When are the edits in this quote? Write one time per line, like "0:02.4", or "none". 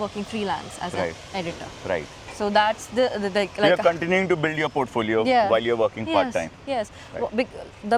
none